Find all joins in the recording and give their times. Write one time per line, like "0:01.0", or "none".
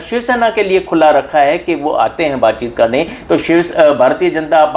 none